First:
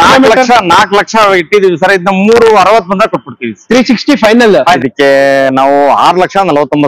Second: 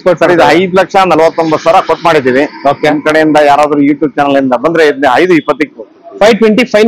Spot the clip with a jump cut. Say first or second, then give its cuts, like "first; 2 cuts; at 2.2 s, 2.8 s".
first; 1 cut; at 4.8 s